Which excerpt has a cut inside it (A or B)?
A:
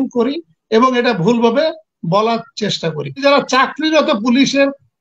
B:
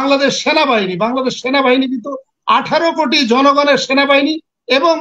A